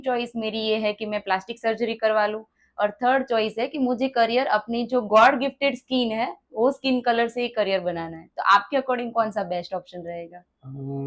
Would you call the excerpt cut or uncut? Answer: uncut